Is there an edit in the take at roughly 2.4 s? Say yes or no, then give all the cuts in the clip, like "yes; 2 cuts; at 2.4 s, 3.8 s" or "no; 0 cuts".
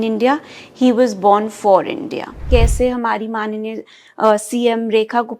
yes; 1 cut; at 2.4 s